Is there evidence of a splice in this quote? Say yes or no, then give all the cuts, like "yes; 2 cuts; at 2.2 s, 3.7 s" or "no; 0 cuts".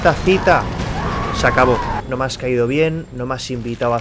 yes; 1 cut; at 2.0 s